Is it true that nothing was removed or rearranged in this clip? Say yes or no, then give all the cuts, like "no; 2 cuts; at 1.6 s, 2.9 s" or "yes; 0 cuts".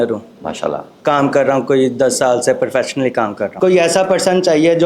no; 1 cut; at 3.5 s